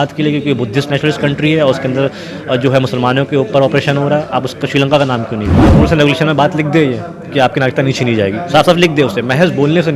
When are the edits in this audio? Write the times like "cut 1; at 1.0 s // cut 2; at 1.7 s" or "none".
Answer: cut 1; at 5.7 s